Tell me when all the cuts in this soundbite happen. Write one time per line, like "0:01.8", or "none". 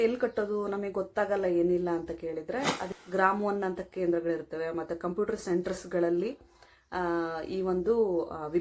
0:02.9